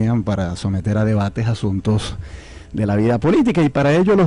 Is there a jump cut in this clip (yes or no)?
no